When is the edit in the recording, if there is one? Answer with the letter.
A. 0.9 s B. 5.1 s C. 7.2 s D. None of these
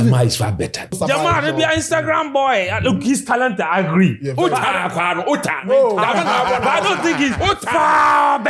A